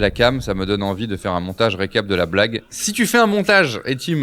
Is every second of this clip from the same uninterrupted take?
no; 1 cut; at 2.6 s

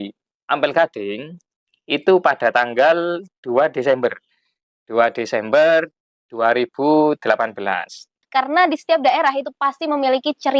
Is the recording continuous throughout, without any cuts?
no; 1 cut; at 8.1 s

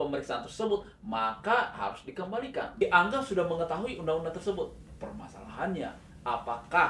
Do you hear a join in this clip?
yes; 1 cut; at 2.7 s

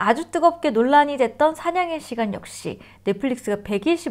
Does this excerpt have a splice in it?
no; 0 cuts

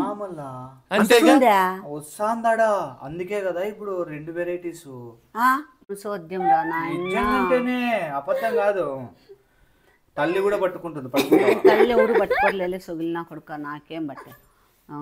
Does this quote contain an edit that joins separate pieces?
yes; 1 cut; at 6.0 s

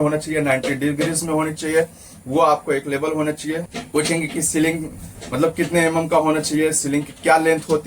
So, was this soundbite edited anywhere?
no; 0 cuts

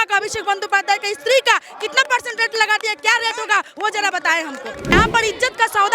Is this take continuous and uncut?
no; 1 cut; at 4.9 s

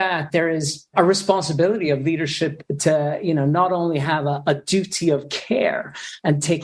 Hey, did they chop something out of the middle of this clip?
no; 0 cuts

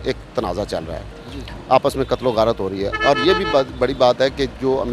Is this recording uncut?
yes; 0 cuts

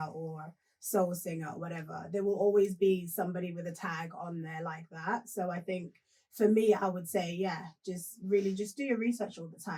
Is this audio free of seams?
yes; 0 cuts

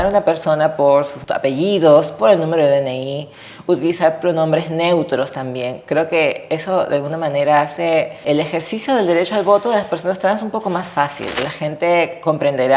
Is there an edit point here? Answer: yes; 3 cuts; at 1.2 s, 8.2 s, 11.5 s

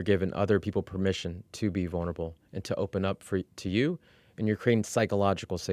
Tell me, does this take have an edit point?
no; 0 cuts

